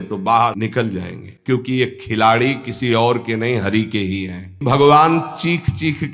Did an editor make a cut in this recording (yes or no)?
yes